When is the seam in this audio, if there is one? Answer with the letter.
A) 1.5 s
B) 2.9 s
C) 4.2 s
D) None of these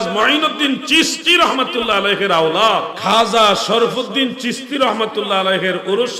B